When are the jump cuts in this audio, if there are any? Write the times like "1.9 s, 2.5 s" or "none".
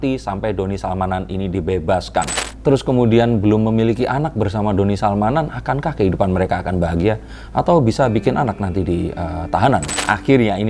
2.3 s, 9.9 s

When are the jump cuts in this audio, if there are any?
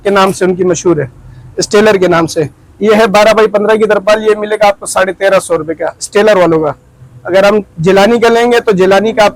none

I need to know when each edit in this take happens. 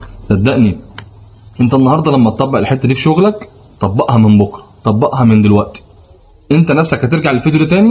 none

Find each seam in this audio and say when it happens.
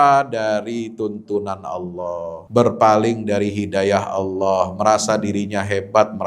2.4 s

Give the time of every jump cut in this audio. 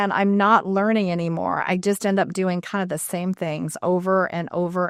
none

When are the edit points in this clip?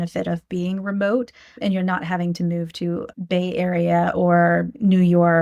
1.5 s, 3.1 s

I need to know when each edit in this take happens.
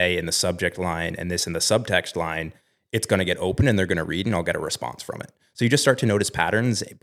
none

